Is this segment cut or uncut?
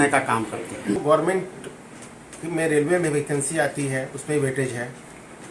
cut